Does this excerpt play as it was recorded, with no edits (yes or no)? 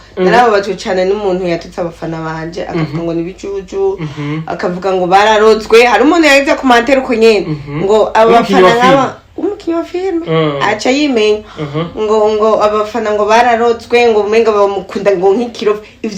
yes